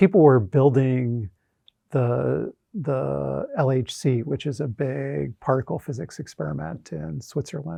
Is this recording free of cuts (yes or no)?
yes